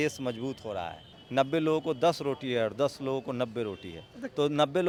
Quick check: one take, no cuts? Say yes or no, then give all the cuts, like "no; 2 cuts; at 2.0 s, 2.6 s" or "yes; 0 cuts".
yes; 0 cuts